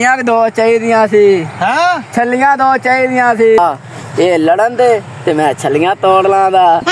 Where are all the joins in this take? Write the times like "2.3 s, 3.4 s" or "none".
3.6 s